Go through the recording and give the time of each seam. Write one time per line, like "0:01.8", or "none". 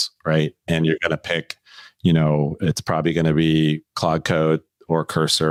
none